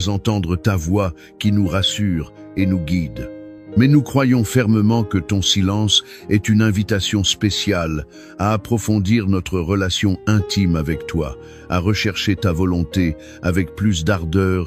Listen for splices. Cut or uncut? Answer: uncut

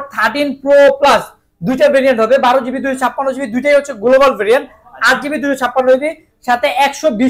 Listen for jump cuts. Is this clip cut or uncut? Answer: uncut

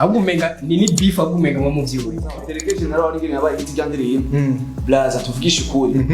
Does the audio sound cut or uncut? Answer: cut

